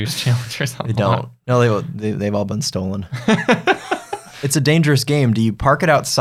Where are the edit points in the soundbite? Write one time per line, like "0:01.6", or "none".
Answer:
0:04.3

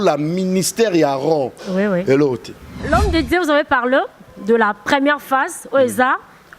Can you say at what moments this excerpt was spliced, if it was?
0:02.8

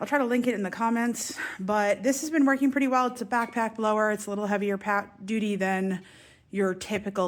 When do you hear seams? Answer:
none

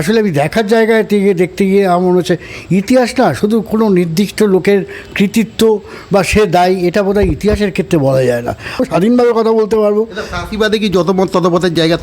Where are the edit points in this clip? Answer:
0:08.8

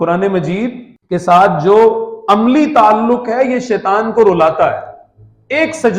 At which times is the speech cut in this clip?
0:00.9

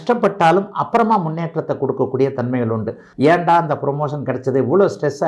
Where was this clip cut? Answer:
0:03.1

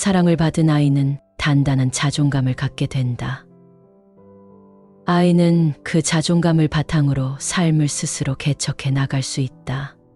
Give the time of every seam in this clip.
0:03.4
0:04.8

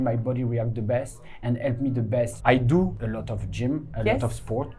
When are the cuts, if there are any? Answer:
0:02.3
0:03.0

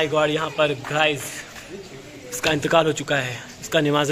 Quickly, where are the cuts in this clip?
none

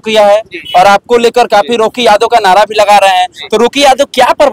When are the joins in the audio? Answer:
none

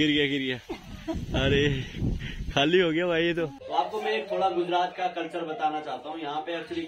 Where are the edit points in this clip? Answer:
0:03.6

